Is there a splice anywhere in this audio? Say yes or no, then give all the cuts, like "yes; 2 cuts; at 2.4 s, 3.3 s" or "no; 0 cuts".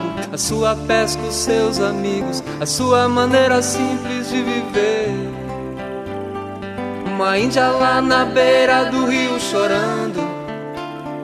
no; 0 cuts